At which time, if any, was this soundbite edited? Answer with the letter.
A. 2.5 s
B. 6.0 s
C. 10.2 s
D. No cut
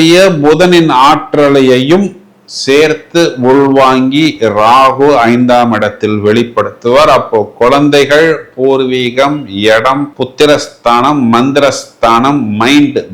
D